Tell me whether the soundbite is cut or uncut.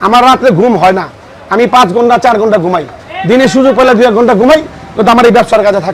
uncut